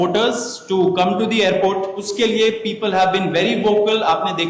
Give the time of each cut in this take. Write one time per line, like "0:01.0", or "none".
0:02.1